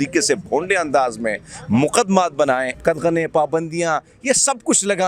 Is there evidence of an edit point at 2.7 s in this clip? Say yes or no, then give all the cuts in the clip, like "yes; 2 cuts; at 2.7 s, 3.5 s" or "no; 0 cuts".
yes; 1 cut; at 2.7 s